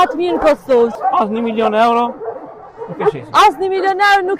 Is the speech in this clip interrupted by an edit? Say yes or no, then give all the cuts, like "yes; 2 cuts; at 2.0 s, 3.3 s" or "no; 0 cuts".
yes; 1 cut; at 0.9 s